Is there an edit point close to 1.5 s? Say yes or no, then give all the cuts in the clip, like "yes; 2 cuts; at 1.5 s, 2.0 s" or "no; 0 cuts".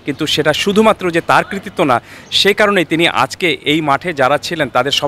no; 0 cuts